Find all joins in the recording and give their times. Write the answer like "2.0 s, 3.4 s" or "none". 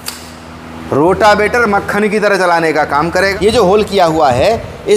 3.3 s